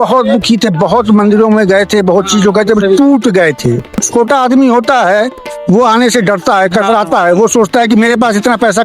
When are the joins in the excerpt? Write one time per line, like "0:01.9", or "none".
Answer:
0:04.1